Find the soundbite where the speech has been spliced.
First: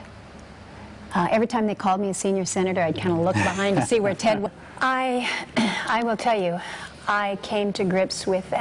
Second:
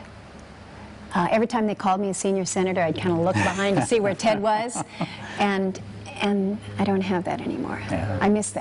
second; 1 cut; at 4.5 s

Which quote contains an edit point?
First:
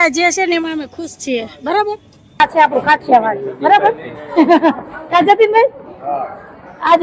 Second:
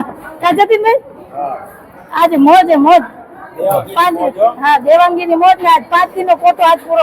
first; 1 cut; at 2.4 s

